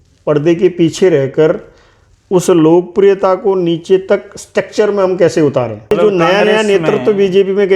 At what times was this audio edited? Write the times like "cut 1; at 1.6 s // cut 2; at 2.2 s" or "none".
cut 1; at 5.8 s